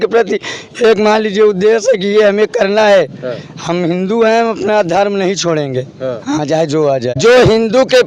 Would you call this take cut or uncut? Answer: cut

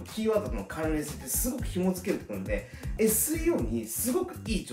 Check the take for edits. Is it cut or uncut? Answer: uncut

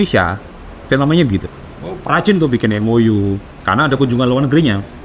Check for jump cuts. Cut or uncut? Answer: uncut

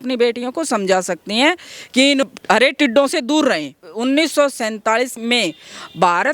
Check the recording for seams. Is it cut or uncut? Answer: cut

